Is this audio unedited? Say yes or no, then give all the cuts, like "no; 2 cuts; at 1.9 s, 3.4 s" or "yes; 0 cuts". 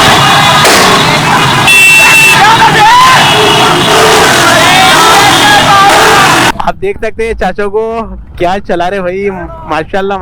no; 1 cut; at 6.6 s